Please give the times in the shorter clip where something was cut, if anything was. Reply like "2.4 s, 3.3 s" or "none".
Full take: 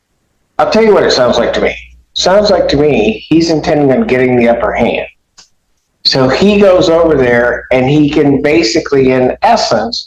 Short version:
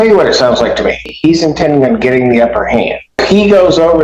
1.1 s, 3.2 s